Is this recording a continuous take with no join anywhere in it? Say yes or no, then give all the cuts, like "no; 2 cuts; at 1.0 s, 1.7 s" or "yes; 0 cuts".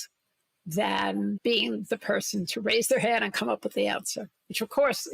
no; 1 cut; at 1.4 s